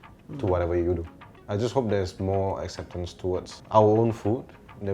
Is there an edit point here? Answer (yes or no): yes